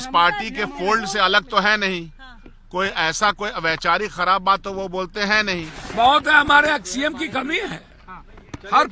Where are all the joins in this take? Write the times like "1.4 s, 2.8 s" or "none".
5.8 s